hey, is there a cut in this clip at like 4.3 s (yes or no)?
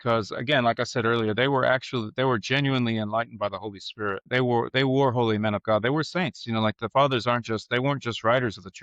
yes